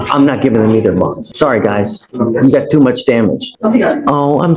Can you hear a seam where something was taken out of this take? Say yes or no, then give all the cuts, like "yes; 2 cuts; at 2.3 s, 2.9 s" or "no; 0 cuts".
yes; 2 cuts; at 1.3 s, 3.5 s